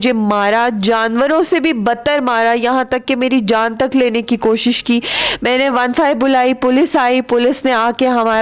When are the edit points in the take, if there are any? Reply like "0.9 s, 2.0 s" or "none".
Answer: none